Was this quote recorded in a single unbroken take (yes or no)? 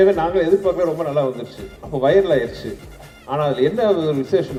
yes